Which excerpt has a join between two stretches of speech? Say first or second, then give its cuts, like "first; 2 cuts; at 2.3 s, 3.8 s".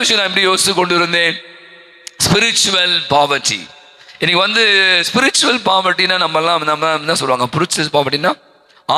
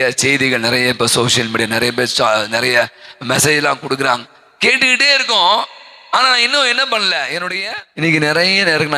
second; 1 cut; at 7.5 s